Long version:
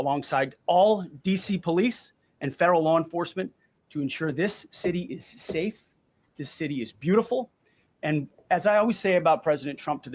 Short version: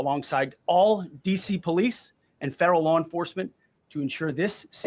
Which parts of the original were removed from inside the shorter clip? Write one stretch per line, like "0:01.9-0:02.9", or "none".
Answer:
none